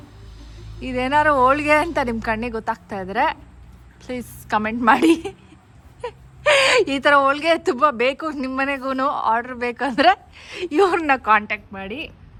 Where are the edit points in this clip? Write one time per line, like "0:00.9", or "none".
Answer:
none